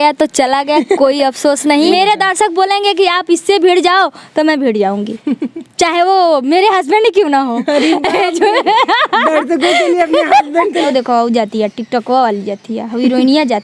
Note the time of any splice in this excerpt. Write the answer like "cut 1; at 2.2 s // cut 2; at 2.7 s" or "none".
cut 1; at 1.8 s // cut 2; at 10.9 s